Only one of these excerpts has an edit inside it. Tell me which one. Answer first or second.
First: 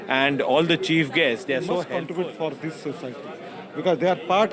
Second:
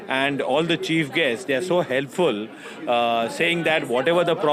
first